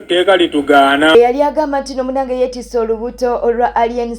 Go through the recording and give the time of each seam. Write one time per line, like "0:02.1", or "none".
0:01.1